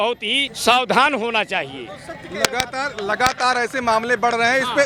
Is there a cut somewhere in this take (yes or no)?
no